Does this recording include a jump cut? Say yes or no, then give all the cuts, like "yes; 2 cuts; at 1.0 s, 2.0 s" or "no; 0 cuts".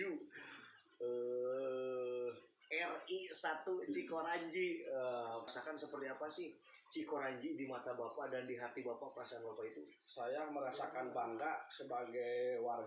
yes; 1 cut; at 5.4 s